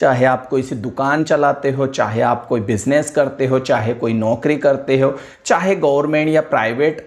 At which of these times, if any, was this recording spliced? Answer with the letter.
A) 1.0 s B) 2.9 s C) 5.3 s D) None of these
D